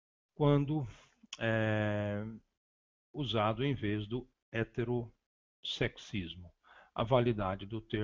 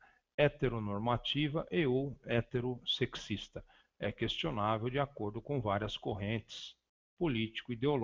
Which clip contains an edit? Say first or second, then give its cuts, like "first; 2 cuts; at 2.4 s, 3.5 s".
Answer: first; 1 cut; at 6.4 s